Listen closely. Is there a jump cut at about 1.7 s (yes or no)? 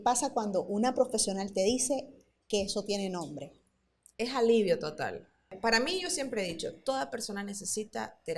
no